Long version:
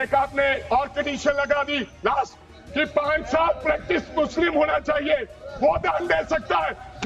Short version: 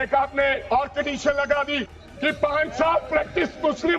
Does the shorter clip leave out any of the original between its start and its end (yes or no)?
yes